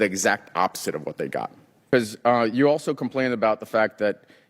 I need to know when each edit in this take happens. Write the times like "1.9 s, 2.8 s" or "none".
1.7 s